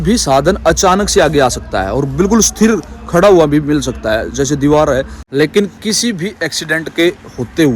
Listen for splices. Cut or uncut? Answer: cut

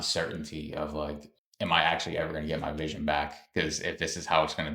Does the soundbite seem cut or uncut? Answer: uncut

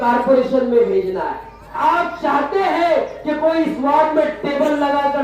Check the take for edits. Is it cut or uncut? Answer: cut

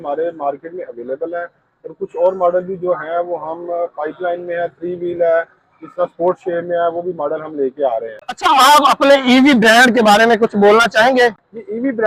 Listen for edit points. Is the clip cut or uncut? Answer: uncut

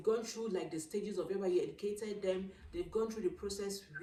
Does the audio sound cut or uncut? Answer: uncut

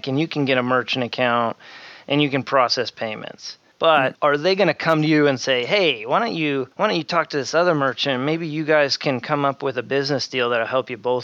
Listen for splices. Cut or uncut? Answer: uncut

